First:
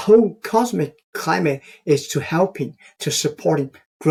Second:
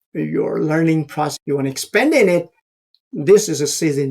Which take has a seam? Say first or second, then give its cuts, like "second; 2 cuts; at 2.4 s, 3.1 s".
second; 1 cut; at 1.3 s